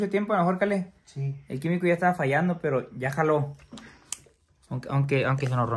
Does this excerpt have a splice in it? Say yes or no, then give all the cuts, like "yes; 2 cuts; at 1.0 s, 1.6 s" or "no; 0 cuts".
no; 0 cuts